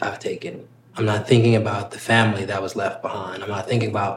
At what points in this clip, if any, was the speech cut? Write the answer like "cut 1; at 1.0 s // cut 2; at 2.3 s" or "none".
cut 1; at 0.9 s

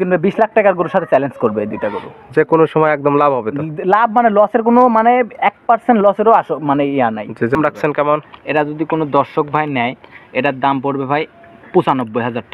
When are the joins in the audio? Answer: cut 1; at 7.5 s

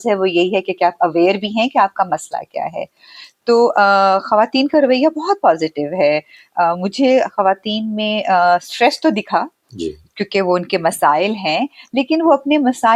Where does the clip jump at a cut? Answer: none

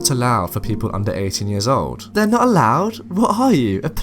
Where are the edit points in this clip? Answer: cut 1; at 2.0 s

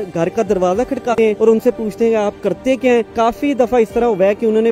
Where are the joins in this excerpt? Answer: cut 1; at 1.1 s // cut 2; at 3.1 s

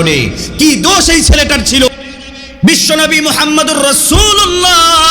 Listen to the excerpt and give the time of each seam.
cut 1; at 1.9 s

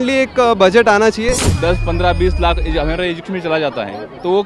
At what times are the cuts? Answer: cut 1; at 1.4 s

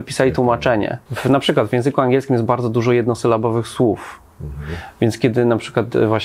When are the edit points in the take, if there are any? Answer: cut 1; at 1.0 s

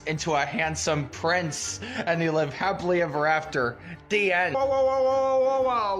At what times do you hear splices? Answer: cut 1; at 4.5 s

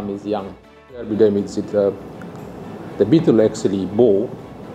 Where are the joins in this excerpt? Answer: cut 1; at 1.1 s

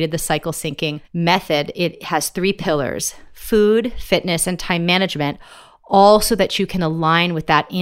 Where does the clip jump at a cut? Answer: cut 1; at 1.0 s

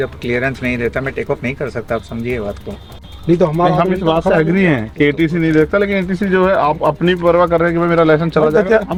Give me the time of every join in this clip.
none

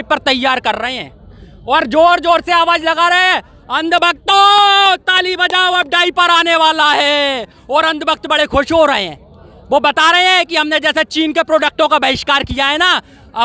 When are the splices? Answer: none

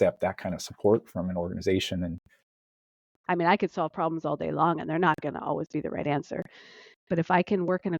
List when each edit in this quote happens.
cut 1; at 2.6 s

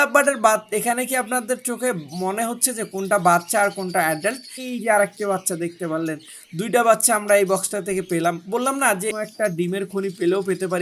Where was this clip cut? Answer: cut 1; at 4.5 s // cut 2; at 9.1 s

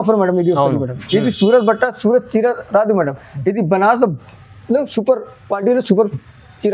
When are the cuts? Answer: none

